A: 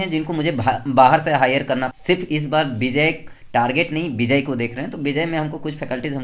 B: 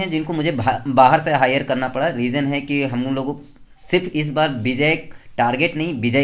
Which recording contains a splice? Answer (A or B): A